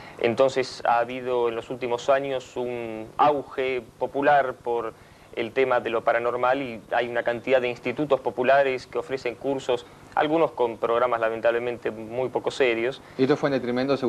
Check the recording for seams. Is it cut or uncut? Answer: uncut